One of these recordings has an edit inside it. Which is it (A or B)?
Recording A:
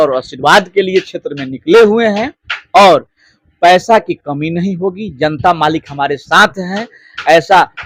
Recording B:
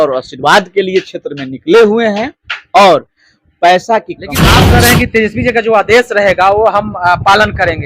B